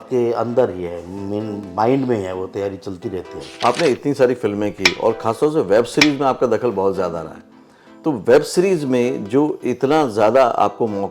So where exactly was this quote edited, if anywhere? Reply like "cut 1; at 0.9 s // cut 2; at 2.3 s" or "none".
cut 1; at 3.4 s

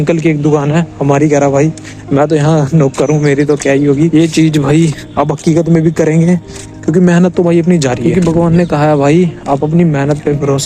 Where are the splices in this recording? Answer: cut 1; at 4.1 s // cut 2; at 8.0 s

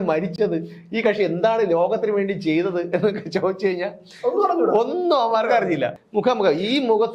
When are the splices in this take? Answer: cut 1; at 6.0 s

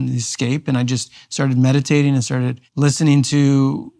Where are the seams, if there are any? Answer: cut 1; at 2.6 s

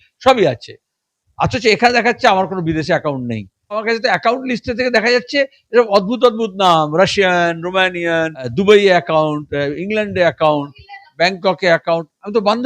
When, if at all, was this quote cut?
cut 1; at 3.8 s // cut 2; at 8.5 s

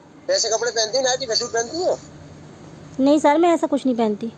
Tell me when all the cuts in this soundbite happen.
none

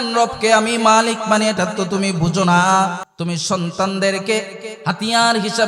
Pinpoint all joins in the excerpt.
cut 1; at 3.0 s

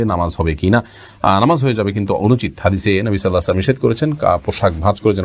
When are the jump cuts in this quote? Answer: none

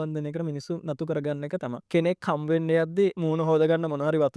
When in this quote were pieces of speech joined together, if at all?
cut 1; at 1.8 s // cut 2; at 3.2 s

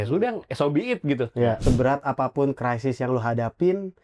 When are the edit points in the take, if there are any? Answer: cut 1; at 1.6 s

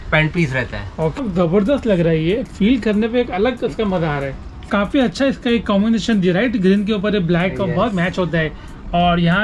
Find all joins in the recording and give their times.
cut 1; at 1.2 s // cut 2; at 4.7 s

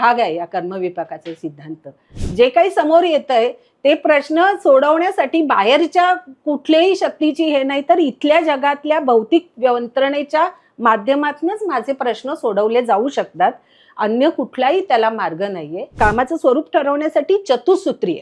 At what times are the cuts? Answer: cut 1; at 2.1 s // cut 2; at 16.0 s

